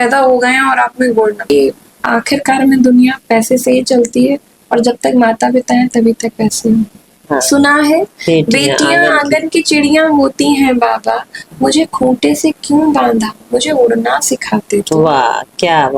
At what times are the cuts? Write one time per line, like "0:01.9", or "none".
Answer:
0:01.4
0:07.2